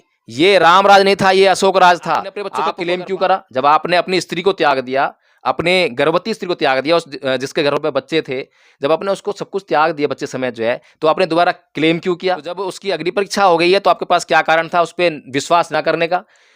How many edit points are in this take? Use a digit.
2